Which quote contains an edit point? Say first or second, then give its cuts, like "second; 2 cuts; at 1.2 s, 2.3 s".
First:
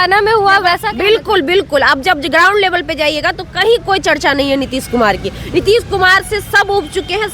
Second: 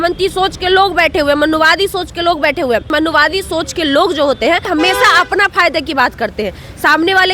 second; 2 cuts; at 2.9 s, 4.7 s